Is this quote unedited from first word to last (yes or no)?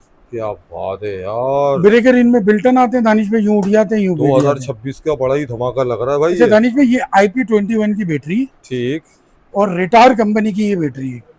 yes